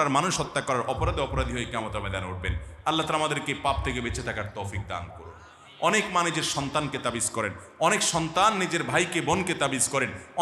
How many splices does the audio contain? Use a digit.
0